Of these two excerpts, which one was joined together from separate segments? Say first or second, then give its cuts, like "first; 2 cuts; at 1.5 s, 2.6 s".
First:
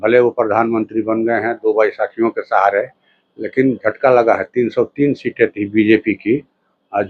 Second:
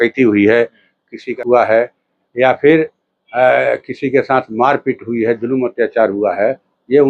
second; 1 cut; at 1.4 s